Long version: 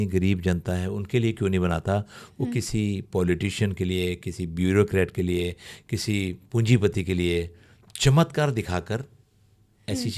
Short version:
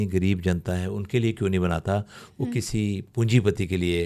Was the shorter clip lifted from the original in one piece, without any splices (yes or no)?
no